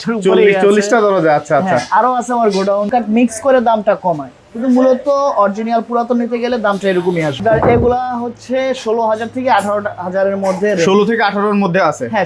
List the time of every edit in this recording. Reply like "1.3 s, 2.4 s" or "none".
2.9 s, 7.4 s